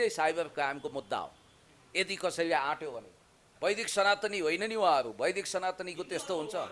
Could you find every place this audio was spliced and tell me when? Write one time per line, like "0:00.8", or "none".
0:03.5